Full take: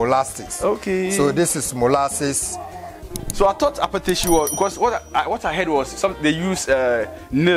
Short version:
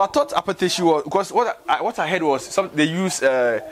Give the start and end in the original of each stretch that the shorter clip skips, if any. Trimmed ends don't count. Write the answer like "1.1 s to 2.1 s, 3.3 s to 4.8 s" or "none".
none